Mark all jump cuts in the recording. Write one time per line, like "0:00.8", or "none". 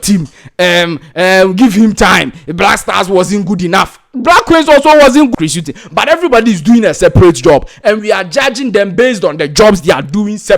0:05.3